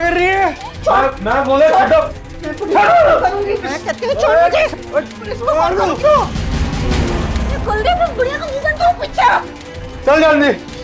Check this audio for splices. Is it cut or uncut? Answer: cut